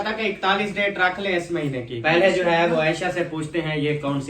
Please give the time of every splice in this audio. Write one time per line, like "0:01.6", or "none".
0:02.0